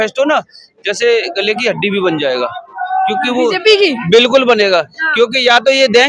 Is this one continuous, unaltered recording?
yes; 0 cuts

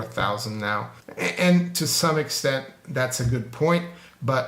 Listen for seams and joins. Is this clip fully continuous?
no; 1 cut; at 1.0 s

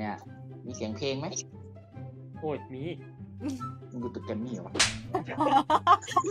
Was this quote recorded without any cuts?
yes; 0 cuts

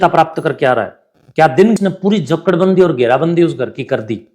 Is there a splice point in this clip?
yes; 1 cut; at 1.8 s

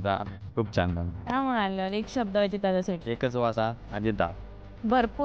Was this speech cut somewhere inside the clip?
yes; 2 cuts; at 1.1 s, 3.1 s

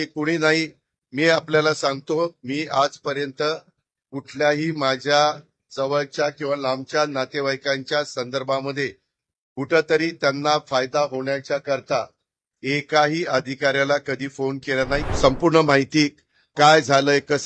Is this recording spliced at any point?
yes; 1 cut; at 15.1 s

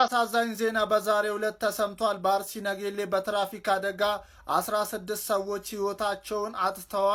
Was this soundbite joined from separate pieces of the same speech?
no; 0 cuts

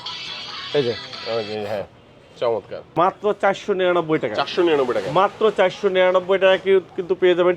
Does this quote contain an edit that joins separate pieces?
yes; 1 cut; at 2.8 s

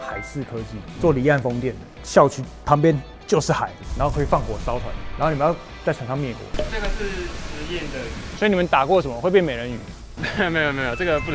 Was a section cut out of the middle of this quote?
yes; 2 cuts; at 3.7 s, 6.5 s

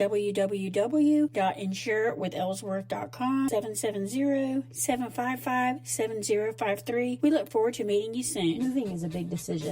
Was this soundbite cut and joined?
yes; 1 cut; at 8.6 s

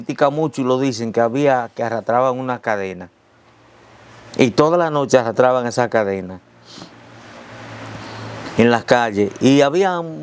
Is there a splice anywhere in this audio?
no; 0 cuts

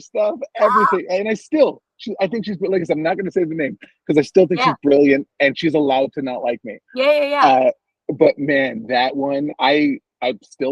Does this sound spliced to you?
no; 0 cuts

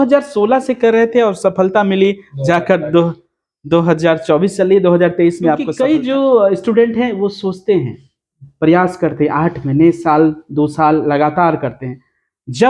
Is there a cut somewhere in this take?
yes; 1 cut; at 5.7 s

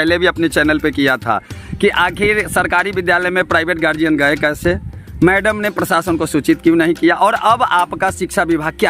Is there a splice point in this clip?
no; 0 cuts

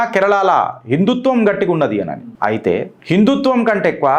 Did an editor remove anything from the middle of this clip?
yes; 1 cut; at 2.7 s

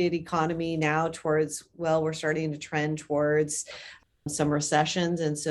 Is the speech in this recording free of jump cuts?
yes; 0 cuts

